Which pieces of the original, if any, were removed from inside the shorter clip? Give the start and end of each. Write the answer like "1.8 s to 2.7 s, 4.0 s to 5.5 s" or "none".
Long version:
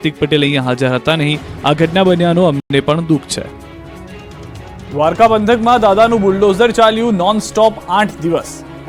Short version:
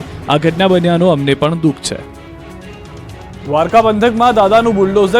2.6 s to 2.7 s